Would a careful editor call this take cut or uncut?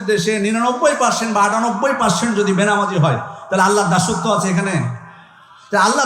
uncut